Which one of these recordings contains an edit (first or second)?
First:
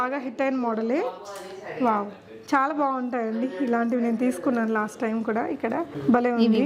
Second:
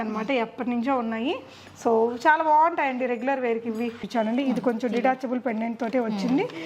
second